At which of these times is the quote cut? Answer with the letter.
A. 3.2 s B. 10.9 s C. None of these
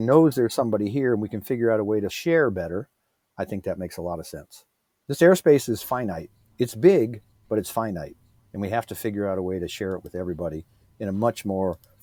C